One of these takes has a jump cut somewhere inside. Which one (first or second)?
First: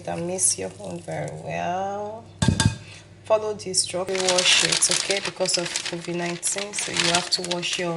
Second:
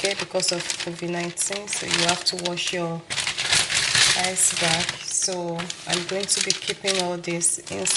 first